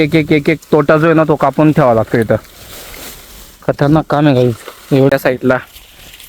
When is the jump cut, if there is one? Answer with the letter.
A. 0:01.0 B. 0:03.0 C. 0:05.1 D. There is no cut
C